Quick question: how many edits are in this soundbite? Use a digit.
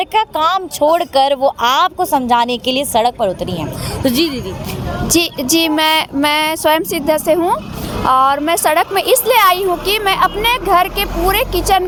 0